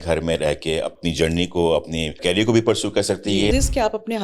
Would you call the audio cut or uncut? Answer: cut